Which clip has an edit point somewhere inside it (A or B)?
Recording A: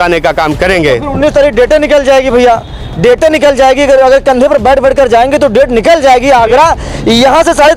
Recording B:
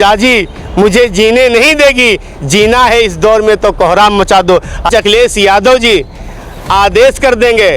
B